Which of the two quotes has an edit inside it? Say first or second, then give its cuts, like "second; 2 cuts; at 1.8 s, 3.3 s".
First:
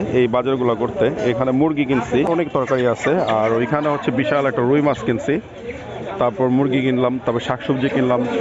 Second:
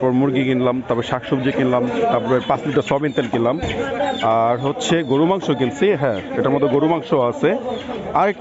first; 1 cut; at 2.3 s